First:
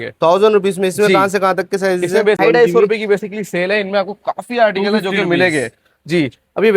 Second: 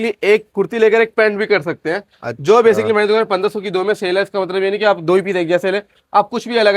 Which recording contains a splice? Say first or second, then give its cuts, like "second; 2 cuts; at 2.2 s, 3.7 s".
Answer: first; 1 cut; at 2.4 s